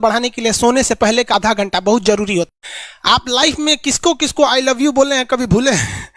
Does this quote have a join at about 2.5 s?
yes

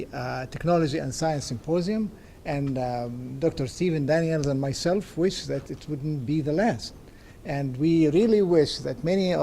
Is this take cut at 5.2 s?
no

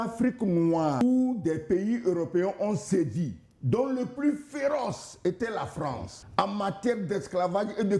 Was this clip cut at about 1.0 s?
yes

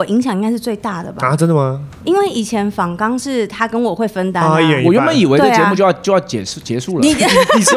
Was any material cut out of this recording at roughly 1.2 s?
no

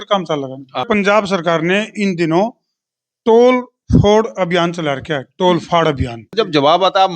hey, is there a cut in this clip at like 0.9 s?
yes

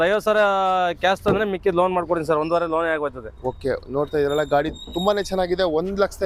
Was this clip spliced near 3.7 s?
no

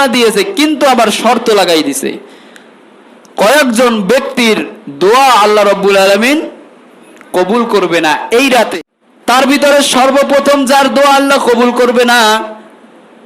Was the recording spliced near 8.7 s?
yes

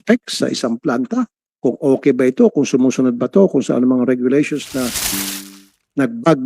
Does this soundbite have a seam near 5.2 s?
yes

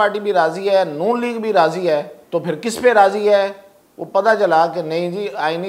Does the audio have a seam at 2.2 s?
yes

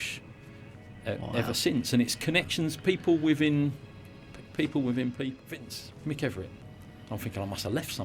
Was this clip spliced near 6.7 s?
no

